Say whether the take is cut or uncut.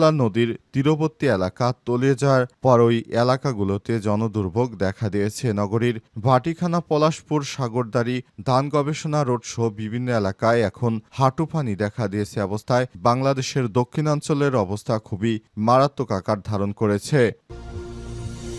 cut